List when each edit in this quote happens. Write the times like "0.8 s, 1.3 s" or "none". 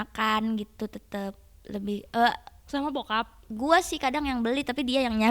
none